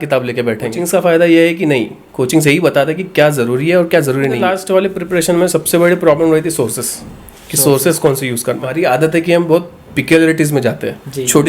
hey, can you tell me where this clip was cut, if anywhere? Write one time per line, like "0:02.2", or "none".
0:00.8
0:04.4
0:08.7